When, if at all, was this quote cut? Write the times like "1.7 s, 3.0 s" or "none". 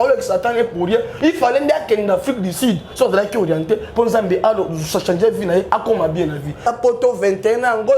6.6 s

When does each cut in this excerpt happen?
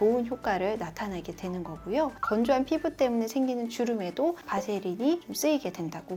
none

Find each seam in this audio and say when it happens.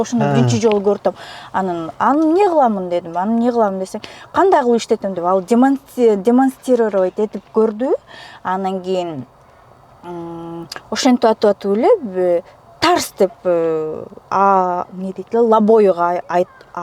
none

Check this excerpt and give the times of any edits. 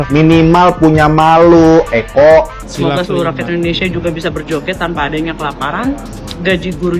2.6 s

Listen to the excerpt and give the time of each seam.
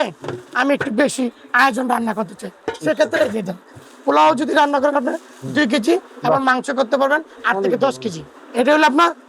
8.3 s

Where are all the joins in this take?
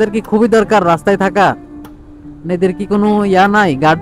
none

